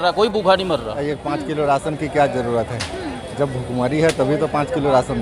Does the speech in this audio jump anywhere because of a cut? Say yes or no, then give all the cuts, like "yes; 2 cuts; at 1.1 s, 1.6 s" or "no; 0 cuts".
yes; 1 cut; at 1.0 s